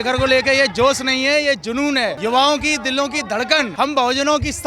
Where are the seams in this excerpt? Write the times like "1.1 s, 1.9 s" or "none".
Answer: 2.2 s, 3.7 s